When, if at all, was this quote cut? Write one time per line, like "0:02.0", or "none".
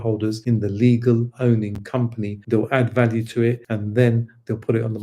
0:02.4
0:03.6